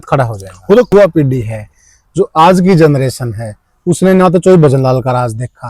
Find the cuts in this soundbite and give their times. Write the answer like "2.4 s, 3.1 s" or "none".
0.9 s

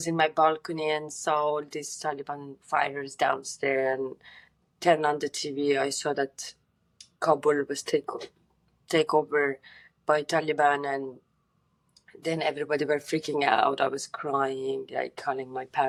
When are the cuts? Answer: none

